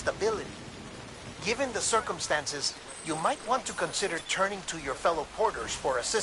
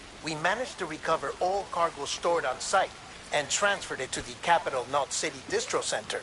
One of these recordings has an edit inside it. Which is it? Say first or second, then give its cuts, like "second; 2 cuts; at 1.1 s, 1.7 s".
second; 1 cut; at 5.1 s